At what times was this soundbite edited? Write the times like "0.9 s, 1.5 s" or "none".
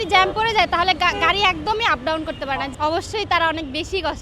2.7 s